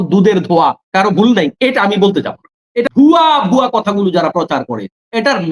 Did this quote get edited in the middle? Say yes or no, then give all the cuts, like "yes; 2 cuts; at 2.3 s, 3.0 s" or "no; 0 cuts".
yes; 1 cut; at 2.9 s